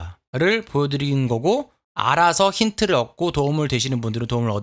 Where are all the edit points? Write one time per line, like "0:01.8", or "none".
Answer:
none